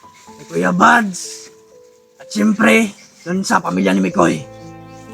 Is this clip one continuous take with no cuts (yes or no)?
yes